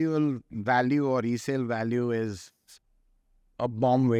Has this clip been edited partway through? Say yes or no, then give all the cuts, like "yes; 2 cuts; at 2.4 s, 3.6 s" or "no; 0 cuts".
no; 0 cuts